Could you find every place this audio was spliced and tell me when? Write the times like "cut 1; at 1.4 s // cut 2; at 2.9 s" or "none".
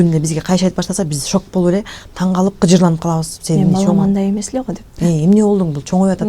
none

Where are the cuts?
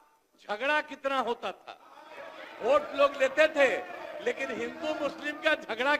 none

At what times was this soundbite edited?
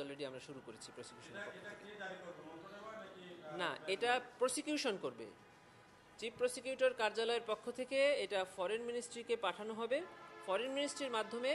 cut 1; at 2.0 s

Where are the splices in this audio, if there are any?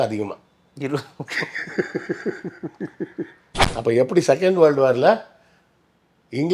cut 1; at 3.6 s

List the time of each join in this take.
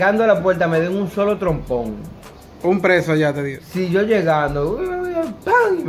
none

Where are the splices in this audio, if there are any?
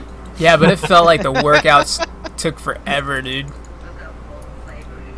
cut 1; at 2.2 s

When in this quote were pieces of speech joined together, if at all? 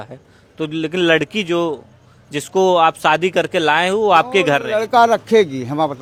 none

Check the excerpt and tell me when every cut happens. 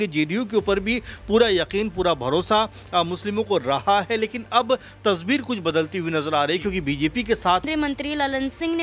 cut 1; at 7.7 s

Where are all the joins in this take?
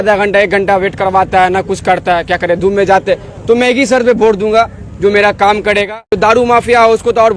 cut 1; at 6.0 s

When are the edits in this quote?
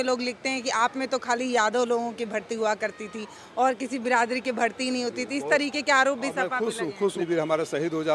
cut 1; at 7.2 s

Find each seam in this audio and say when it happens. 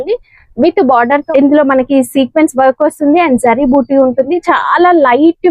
cut 1; at 1.2 s

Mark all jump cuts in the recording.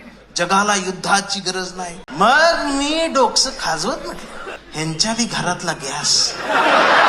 cut 1; at 2.0 s // cut 2; at 4.6 s

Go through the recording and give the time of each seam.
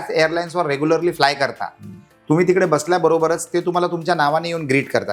none

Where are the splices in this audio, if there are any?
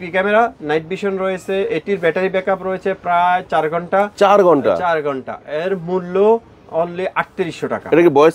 none

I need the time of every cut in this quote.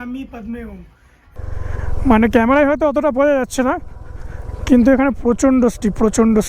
cut 1; at 1.4 s

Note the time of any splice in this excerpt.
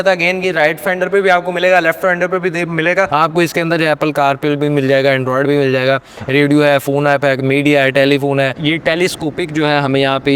cut 1; at 3.1 s // cut 2; at 8.6 s

